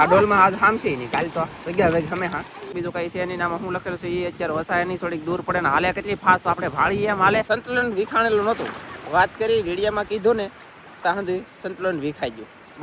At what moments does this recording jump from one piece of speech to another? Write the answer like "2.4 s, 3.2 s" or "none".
2.6 s, 7.5 s